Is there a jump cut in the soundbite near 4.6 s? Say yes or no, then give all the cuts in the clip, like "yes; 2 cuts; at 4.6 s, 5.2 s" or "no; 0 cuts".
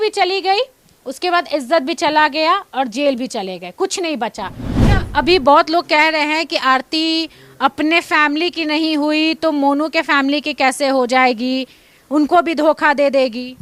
yes; 1 cut; at 4.6 s